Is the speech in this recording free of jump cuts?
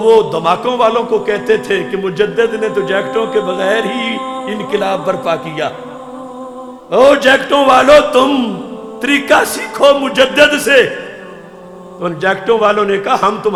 yes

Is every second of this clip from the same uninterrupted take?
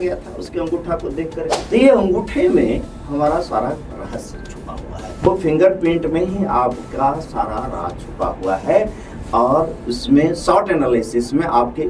no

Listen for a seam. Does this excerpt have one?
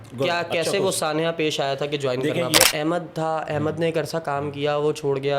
yes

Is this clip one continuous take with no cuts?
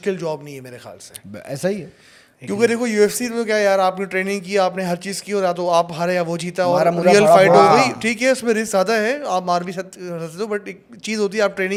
yes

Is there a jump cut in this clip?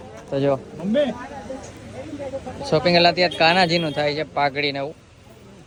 no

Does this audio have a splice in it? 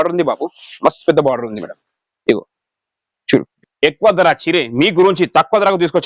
yes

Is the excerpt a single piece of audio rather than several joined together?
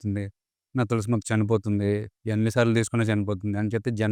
yes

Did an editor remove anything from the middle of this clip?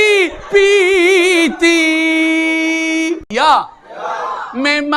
yes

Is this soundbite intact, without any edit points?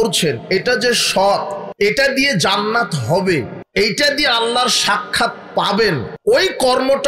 no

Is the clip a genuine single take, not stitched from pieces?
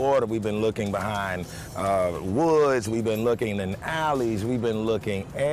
yes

